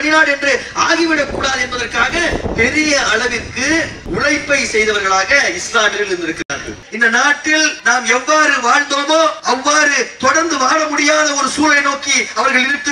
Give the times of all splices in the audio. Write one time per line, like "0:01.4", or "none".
0:04.0
0:06.8
0:07.8
0:09.4